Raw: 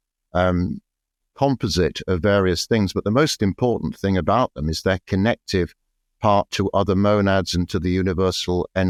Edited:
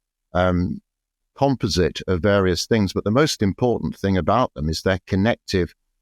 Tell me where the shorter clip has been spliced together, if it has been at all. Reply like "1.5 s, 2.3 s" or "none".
none